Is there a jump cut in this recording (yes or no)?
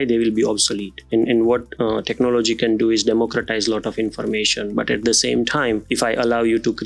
yes